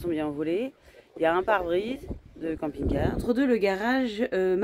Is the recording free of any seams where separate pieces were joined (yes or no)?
no